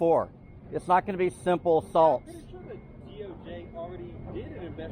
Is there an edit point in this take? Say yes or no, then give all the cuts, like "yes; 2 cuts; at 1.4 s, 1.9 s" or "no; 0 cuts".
no; 0 cuts